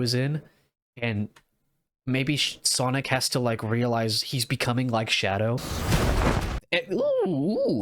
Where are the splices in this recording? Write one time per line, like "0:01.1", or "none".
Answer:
0:05.7